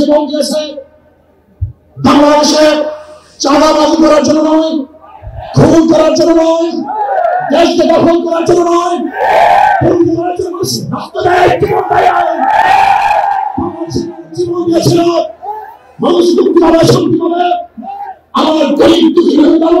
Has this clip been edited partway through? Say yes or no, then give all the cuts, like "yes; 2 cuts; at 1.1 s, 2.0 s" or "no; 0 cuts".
no; 0 cuts